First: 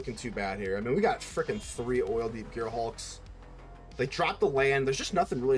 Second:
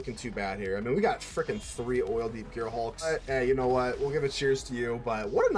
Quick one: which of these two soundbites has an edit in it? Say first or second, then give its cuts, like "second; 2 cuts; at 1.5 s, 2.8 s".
second; 1 cut; at 3.1 s